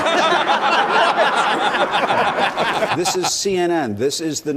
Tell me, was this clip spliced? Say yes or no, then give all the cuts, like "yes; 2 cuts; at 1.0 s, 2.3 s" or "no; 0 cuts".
no; 0 cuts